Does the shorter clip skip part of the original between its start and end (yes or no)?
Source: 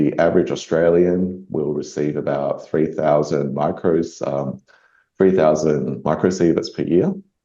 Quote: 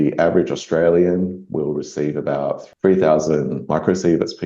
yes